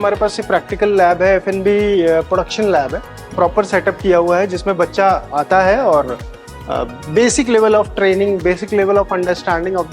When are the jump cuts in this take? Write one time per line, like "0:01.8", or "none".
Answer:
0:03.2
0:05.3